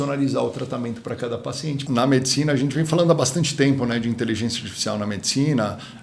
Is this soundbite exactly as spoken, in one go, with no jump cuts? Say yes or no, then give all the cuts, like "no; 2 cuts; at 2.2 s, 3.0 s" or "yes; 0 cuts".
no; 1 cut; at 1.8 s